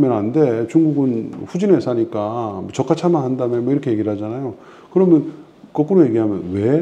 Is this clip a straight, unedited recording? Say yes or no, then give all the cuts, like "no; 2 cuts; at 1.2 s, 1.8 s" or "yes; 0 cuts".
yes; 0 cuts